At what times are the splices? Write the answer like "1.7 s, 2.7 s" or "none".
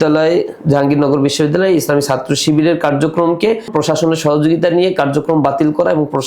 3.7 s